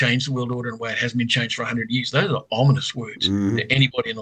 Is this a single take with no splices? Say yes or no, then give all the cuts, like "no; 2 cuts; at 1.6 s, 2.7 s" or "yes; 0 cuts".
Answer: yes; 0 cuts